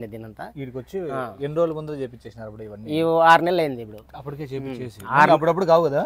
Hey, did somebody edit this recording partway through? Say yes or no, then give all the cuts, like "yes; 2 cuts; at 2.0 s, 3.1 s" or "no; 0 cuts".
no; 0 cuts